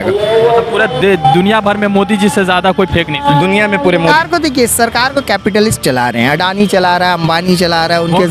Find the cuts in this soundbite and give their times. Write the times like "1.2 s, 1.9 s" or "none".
4.1 s

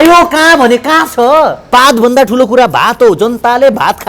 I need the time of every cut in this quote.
1.7 s

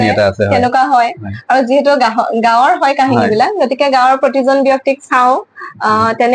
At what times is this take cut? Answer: none

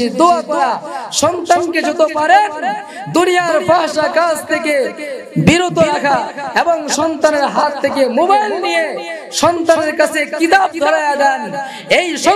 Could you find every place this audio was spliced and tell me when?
none

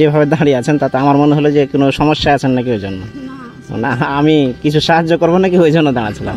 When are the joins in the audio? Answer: none

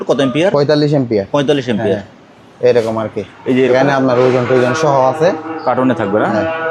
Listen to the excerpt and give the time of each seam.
none

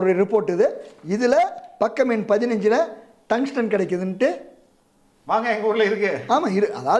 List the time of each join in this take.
none

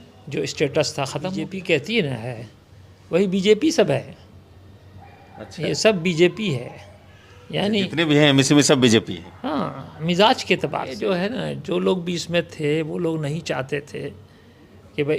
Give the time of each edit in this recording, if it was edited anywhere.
1.5 s, 10.9 s

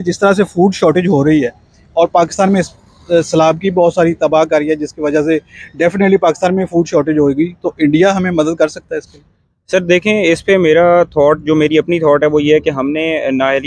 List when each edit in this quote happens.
none

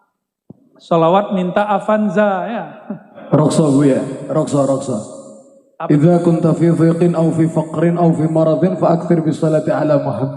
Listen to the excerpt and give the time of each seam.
3.2 s

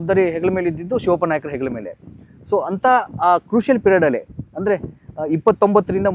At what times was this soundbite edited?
none

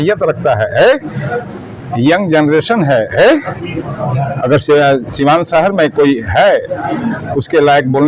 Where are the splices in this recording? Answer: none

